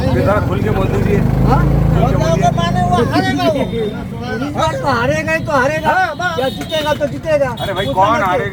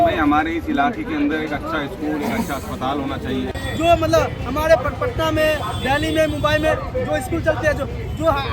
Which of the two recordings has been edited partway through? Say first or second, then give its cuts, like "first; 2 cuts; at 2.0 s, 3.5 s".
second; 1 cut; at 3.5 s